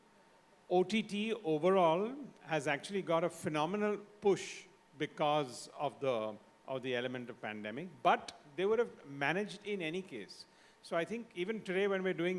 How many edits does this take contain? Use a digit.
0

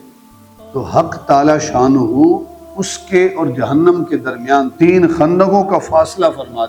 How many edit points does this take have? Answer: 1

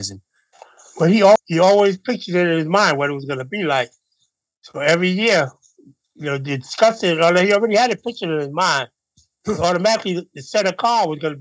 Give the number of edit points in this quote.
1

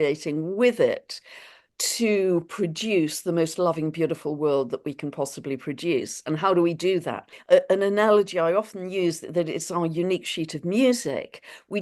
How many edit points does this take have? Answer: 1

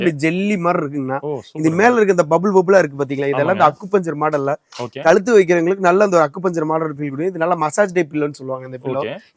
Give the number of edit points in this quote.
0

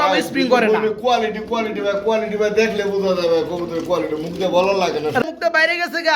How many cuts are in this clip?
1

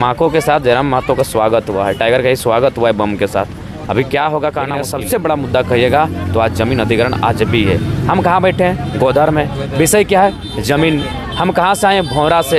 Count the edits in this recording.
1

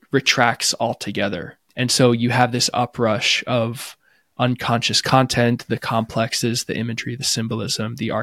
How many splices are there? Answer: 1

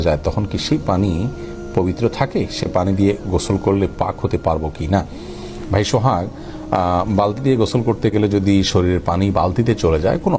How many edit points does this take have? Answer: 0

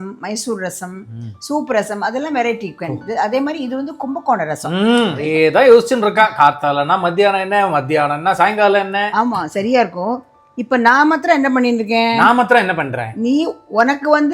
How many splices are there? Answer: 1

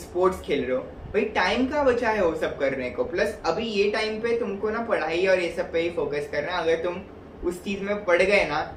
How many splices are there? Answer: 0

